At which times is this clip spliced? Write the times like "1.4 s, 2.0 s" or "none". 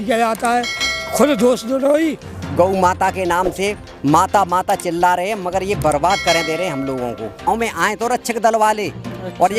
2.3 s, 7.5 s